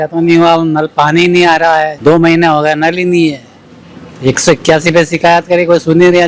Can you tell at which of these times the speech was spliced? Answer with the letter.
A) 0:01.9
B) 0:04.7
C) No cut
A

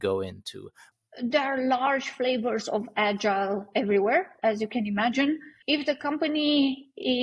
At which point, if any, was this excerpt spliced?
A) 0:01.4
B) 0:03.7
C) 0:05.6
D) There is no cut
C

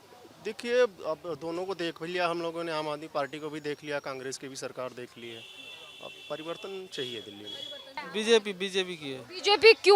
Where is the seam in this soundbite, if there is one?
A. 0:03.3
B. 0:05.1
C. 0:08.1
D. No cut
C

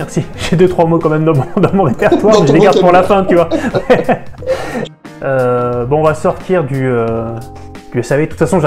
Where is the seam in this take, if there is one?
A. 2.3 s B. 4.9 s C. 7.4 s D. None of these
B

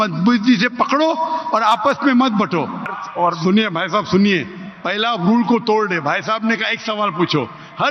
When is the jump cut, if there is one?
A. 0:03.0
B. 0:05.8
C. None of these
A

